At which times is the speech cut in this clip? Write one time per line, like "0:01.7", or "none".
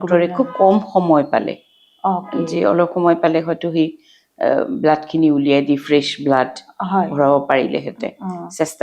none